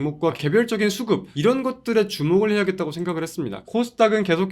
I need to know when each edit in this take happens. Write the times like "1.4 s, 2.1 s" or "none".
1.3 s, 3.6 s

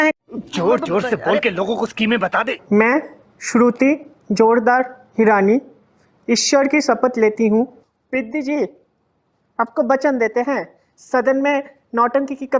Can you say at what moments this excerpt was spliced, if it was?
2.6 s, 8.0 s

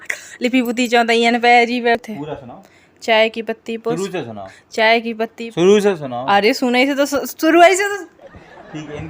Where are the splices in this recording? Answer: 2.0 s

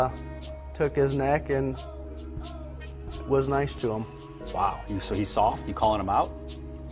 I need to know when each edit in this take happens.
1.8 s

